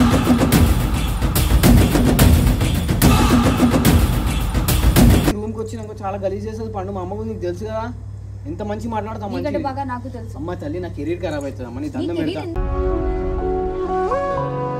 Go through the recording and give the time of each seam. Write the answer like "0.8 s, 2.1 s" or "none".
5.4 s